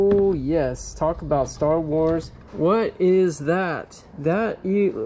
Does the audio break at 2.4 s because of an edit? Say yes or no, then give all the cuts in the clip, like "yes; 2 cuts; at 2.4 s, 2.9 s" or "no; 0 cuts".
yes; 2 cuts; at 2.4 s, 4.0 s